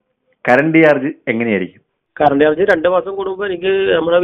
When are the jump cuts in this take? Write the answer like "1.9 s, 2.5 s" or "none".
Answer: none